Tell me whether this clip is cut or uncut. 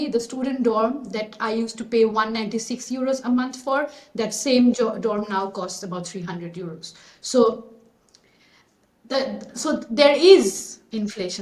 uncut